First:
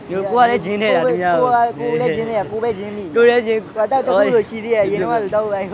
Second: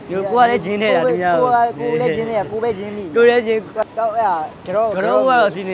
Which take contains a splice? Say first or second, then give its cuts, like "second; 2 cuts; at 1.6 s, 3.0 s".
second; 1 cut; at 3.8 s